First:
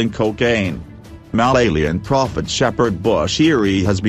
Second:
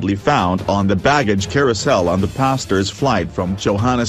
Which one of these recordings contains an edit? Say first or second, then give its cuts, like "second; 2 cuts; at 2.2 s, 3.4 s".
first; 1 cut; at 1.3 s